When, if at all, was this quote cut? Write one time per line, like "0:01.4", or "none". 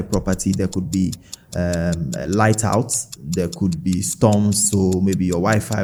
none

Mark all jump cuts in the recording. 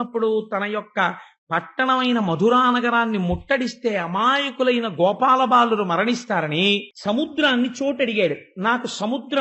0:06.9

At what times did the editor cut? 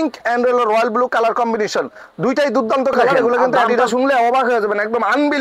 0:03.9

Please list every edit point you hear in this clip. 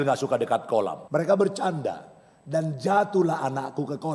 0:01.0

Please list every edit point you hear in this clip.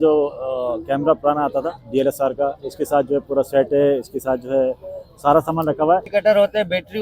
0:06.1

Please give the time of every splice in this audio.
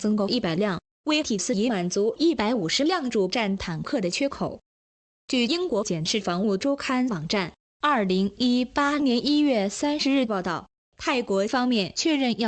0:08.5

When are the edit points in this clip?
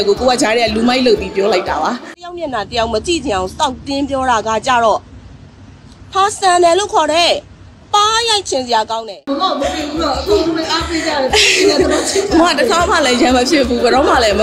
0:02.2

